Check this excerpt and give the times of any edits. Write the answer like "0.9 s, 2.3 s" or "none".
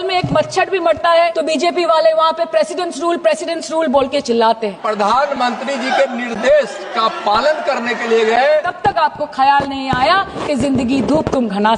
1.4 s, 4.8 s, 8.7 s